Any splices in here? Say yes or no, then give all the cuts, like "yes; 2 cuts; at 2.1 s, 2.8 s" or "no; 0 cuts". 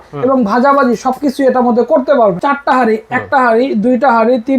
yes; 1 cut; at 2.4 s